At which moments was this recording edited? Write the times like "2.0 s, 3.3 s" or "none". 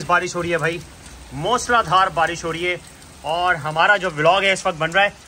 none

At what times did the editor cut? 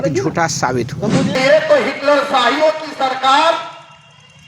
1.3 s

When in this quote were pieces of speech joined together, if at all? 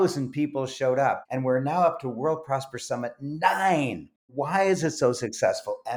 1.3 s, 4.3 s

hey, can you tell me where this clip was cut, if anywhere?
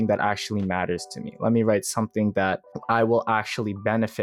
2.7 s

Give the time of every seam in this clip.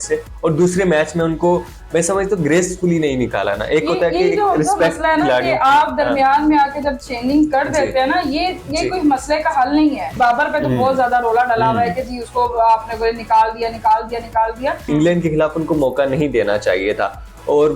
10.1 s, 14.8 s

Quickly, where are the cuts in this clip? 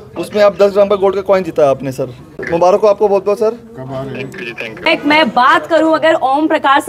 2.4 s, 4.9 s

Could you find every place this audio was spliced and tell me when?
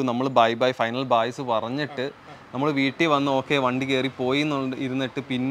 none

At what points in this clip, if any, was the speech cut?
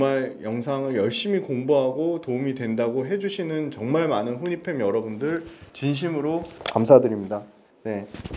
none

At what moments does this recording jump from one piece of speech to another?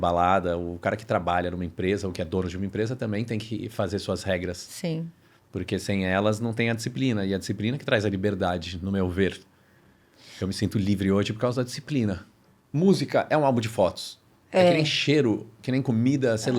12.3 s

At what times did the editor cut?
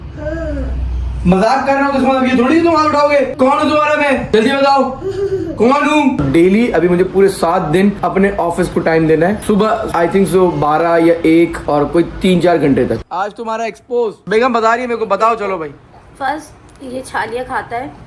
6.2 s, 13.1 s

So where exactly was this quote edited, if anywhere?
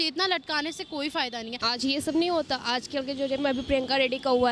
1.6 s

